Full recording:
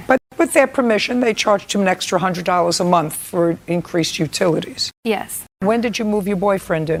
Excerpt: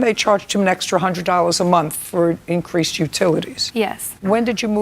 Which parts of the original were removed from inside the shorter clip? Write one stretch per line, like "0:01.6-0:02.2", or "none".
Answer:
0:05.0-0:05.2